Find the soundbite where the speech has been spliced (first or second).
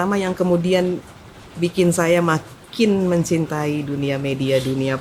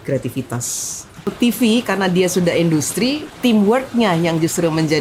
second